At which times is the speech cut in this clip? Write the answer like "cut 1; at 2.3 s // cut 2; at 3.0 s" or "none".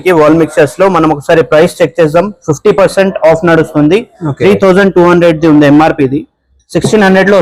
none